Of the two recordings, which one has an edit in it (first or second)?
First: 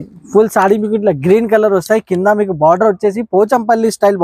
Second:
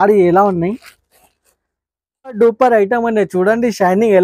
second